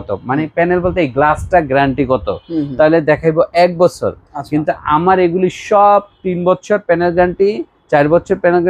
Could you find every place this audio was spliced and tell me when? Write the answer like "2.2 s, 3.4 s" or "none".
none